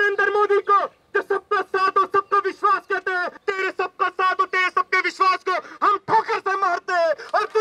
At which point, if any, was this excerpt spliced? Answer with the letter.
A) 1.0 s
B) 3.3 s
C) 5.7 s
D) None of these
B